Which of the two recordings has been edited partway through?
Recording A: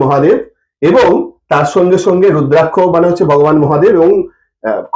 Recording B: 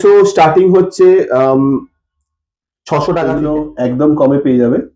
B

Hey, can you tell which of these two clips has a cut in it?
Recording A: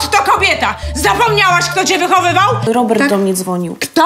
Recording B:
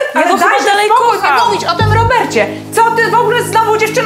A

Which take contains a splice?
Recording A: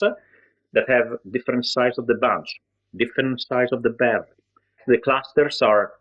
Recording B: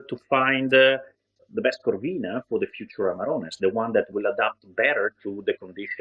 A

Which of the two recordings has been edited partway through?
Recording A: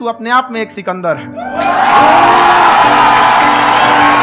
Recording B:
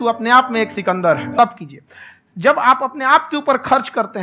B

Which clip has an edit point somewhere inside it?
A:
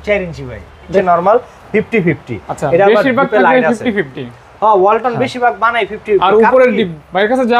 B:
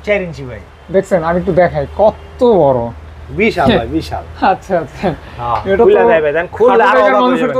A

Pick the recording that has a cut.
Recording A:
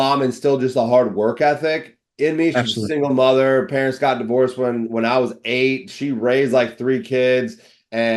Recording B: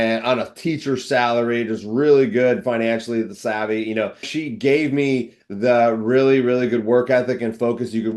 B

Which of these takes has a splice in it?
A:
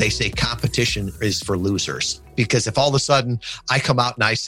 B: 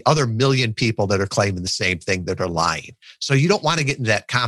A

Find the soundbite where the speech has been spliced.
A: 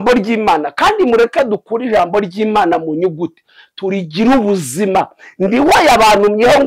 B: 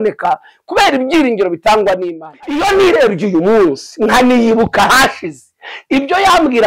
B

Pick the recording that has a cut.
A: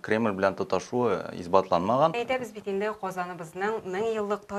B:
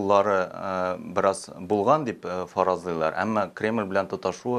A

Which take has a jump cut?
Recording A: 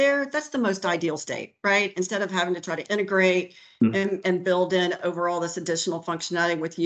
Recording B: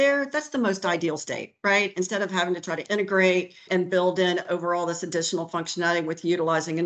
B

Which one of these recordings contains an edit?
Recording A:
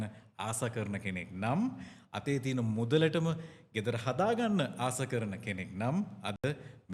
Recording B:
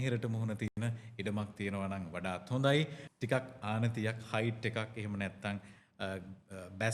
B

